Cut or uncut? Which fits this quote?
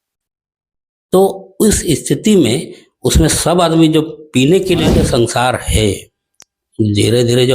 cut